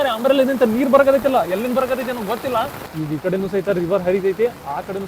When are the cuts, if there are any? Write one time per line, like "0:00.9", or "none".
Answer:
0:02.8

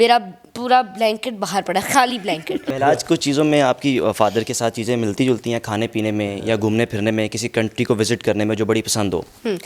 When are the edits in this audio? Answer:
0:02.7

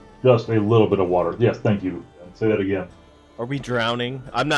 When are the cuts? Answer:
0:02.3

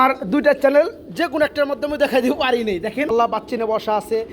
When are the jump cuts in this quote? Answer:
0:03.1

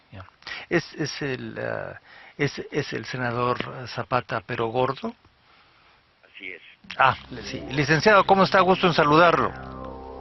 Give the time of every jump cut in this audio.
0:03.4

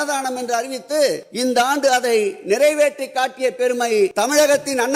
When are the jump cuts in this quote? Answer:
0:01.3
0:04.1

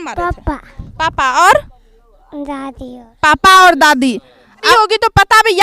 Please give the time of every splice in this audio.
0:04.6

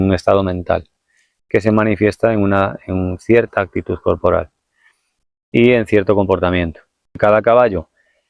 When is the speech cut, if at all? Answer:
0:07.2

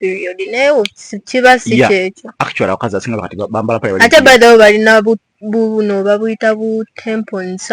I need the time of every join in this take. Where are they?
none

